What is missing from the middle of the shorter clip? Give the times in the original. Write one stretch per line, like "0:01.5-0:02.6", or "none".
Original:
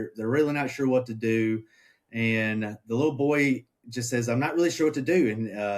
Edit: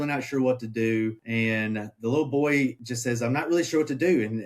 0:01.7-0:02.1
0:03.7-0:03.9